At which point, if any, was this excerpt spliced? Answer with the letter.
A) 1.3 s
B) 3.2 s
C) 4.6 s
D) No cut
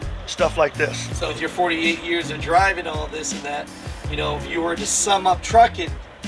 A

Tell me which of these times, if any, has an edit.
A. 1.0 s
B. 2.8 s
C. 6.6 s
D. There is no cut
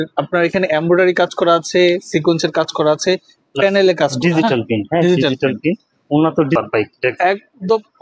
C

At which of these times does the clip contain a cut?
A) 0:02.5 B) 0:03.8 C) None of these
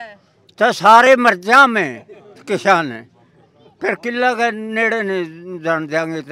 C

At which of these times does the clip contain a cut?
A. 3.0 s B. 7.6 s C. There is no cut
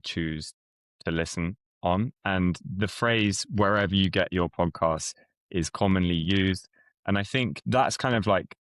B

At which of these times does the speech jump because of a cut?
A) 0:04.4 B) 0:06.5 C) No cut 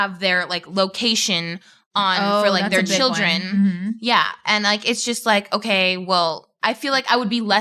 B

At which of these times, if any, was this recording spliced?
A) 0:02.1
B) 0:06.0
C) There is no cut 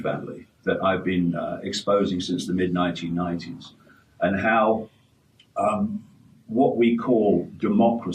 B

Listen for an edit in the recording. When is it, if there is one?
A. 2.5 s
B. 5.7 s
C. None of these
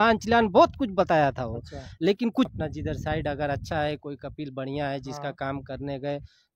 A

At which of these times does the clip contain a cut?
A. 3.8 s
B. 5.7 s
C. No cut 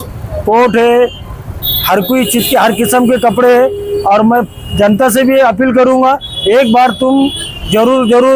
C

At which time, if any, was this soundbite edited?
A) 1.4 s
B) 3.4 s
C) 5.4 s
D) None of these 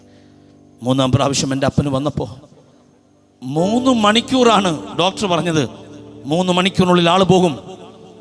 D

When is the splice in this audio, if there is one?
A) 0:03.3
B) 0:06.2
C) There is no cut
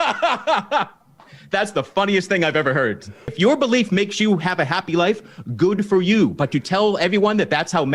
A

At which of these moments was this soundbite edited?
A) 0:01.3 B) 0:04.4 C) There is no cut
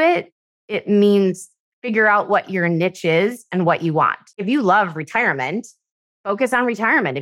B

